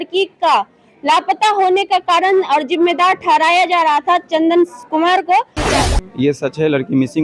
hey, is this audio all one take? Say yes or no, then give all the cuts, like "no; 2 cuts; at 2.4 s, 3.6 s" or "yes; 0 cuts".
no; 1 cut; at 5.7 s